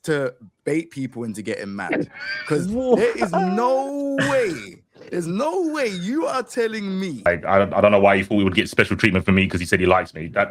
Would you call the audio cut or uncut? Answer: cut